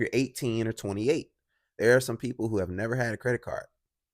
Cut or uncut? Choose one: uncut